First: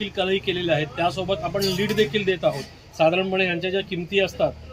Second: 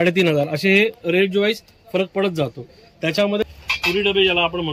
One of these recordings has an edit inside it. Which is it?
second; 1 cut; at 3.4 s

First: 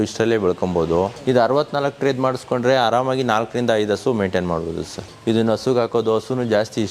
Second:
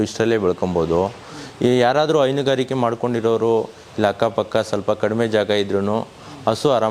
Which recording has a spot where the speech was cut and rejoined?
first; 2 cuts; at 1.2 s, 5.1 s

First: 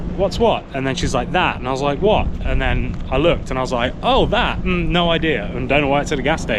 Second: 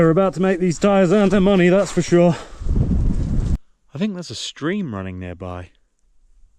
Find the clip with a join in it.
second; 1 cut; at 3.5 s

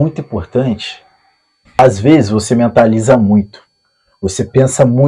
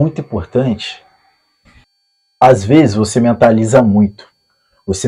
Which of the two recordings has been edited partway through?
first; 1 cut; at 1.8 s

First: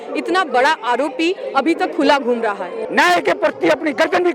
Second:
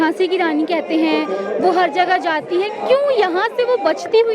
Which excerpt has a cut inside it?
first; 1 cut; at 2.7 s

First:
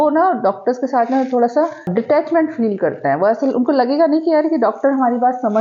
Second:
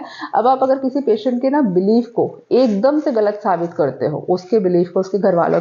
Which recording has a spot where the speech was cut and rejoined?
first; 1 cut; at 1.9 s

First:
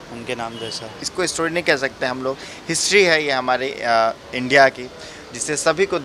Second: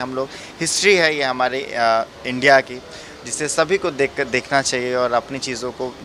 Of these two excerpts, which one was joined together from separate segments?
first; 1 cut; at 1.0 s

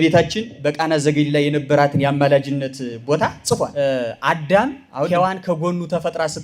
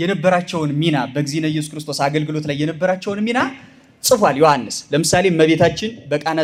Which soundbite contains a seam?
first; 1 cut; at 3.7 s

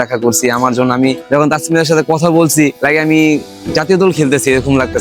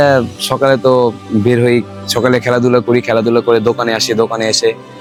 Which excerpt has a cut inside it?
first; 2 cuts; at 1.2 s, 2.8 s

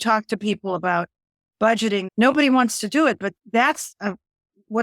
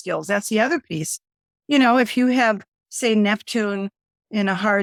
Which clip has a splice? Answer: first; 2 cuts; at 2.1 s, 3.3 s

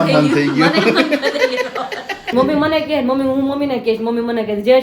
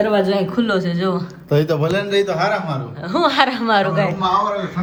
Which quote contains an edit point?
first; 1 cut; at 2.3 s

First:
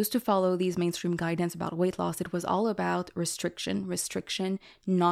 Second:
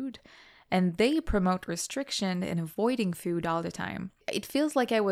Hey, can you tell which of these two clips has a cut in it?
second; 1 cut; at 4.2 s

